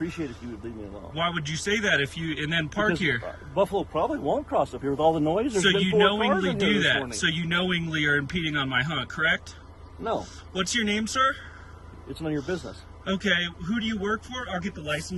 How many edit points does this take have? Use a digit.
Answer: 0